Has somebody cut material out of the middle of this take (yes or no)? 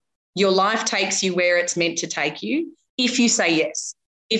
no